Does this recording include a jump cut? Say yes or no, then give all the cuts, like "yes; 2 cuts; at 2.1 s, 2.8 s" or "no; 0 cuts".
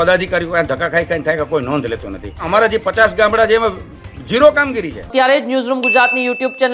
yes; 1 cut; at 2.5 s